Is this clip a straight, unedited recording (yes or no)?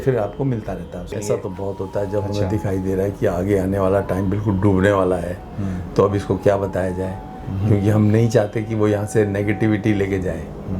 no